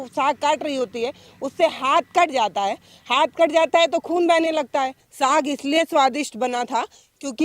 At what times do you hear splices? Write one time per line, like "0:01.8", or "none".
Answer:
0:05.0